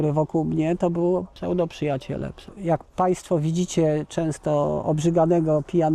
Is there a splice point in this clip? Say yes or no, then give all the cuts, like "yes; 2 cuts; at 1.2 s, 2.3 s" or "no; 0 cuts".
yes; 2 cuts; at 1.3 s, 2.4 s